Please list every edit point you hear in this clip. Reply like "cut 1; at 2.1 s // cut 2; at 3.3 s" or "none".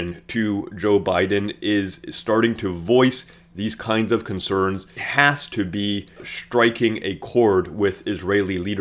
cut 1; at 5.0 s // cut 2; at 6.3 s